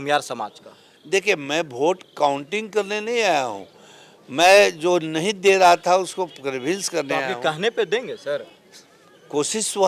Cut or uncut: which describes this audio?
uncut